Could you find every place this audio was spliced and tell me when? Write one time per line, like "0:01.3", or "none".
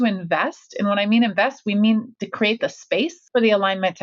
0:02.1
0:03.2